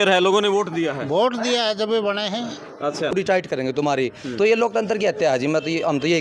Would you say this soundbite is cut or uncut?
cut